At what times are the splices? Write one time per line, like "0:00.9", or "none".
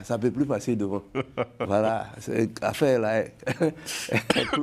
none